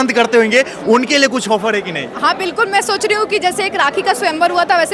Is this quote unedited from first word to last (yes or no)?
yes